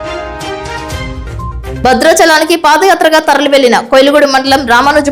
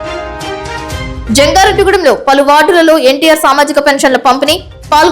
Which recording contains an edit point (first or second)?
second